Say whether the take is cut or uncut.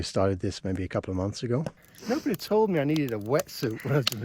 cut